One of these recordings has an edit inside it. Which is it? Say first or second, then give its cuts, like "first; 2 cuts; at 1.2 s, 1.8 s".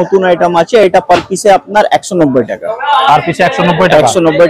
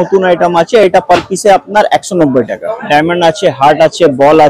second; 1 cut; at 2.8 s